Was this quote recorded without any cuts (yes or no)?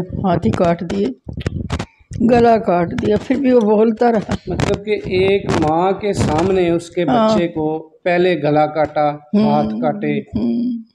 yes